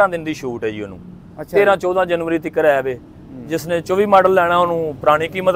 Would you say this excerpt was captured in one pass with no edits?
yes; 0 cuts

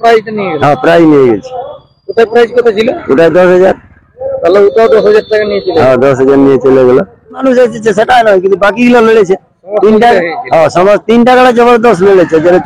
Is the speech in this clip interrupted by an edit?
yes; 1 cut; at 7.4 s

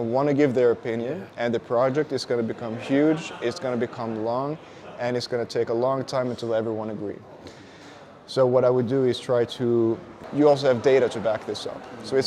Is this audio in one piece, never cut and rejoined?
no; 1 cut; at 10.1 s

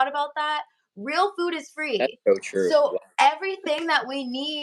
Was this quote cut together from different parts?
no; 0 cuts

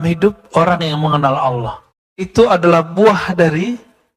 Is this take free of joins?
no; 1 cut; at 1.8 s

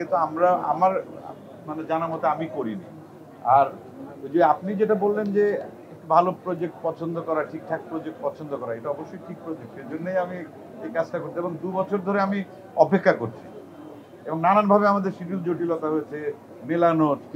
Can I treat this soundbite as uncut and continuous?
yes; 0 cuts

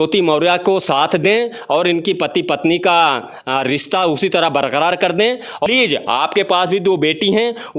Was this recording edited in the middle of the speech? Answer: yes; 1 cut; at 5.7 s

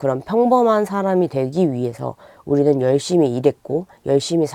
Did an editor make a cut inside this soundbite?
no; 0 cuts

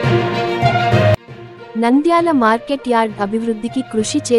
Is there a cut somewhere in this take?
yes; 1 cut; at 1.2 s

